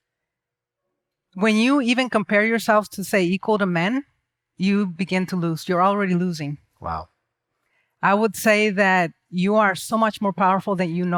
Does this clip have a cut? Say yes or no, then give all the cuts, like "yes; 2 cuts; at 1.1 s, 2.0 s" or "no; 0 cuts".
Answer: no; 0 cuts